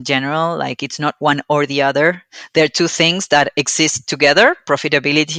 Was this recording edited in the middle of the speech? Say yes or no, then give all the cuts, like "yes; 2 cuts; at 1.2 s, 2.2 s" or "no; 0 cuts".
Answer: no; 0 cuts